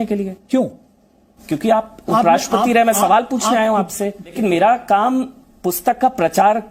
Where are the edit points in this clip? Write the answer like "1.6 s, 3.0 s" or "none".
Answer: 4.3 s